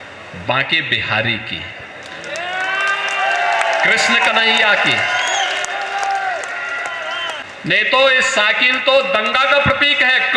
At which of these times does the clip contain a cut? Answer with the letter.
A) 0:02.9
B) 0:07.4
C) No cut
B